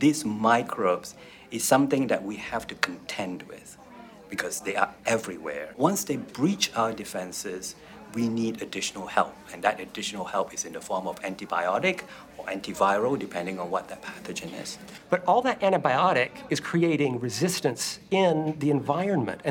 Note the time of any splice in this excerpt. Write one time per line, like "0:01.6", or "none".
0:05.7
0:15.0